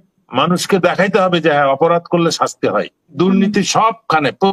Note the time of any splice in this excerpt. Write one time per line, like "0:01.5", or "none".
0:03.1